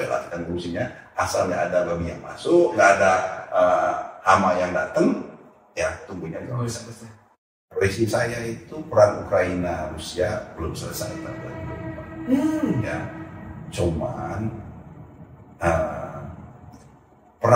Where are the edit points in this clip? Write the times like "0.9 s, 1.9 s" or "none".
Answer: 7.6 s